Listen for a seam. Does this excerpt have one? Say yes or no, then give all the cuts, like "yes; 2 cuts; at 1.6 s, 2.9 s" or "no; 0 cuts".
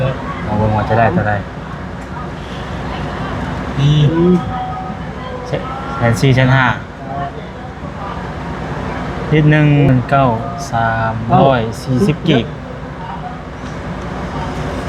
yes; 1 cut; at 9.9 s